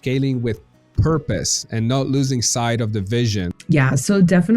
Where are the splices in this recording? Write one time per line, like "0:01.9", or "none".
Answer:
0:03.6